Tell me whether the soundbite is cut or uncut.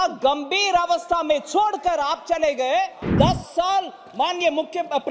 cut